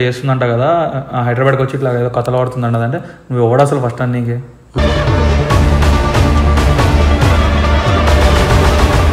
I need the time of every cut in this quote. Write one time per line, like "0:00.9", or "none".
none